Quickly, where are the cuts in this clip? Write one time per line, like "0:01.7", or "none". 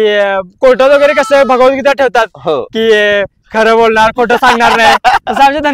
none

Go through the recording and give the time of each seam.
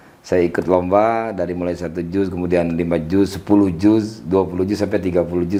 none

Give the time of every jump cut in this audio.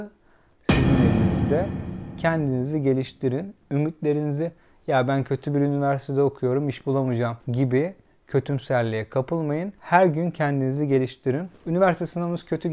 0:07.4
0:09.8

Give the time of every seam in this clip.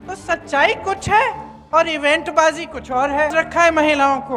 0:03.3

